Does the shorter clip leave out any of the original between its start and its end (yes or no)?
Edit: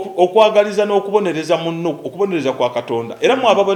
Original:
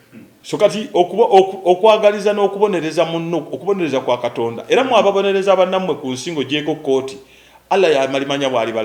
no